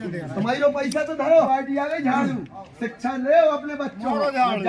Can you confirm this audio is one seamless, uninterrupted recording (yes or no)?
no